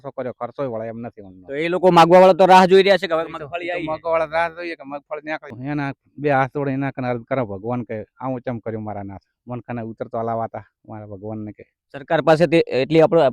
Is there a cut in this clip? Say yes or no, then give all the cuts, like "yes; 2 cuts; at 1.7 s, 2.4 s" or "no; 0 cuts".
yes; 1 cut; at 5.5 s